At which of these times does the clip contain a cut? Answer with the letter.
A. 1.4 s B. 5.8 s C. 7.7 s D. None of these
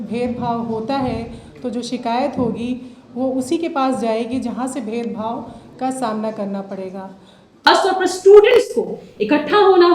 C